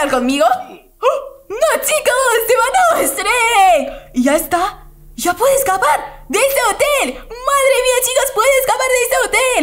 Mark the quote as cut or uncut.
uncut